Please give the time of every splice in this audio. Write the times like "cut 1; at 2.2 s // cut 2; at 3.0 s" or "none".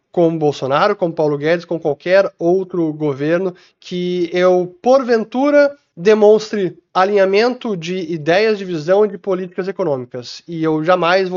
none